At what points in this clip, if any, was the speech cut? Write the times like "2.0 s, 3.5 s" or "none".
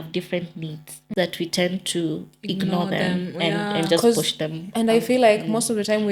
1.1 s